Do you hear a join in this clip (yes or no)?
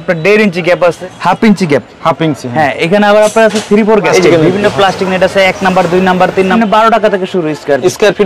yes